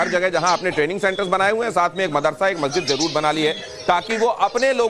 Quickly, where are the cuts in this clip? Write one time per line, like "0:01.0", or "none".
0:03.1